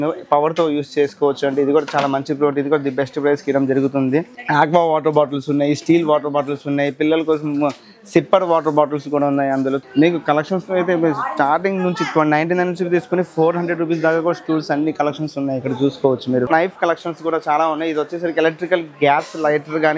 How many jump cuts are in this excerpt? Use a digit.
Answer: 3